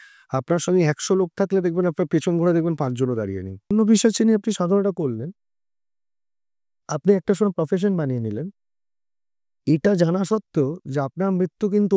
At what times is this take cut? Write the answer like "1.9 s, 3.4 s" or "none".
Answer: 3.7 s